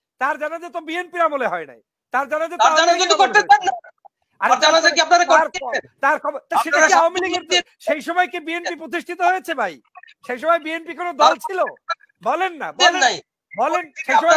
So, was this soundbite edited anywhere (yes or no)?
no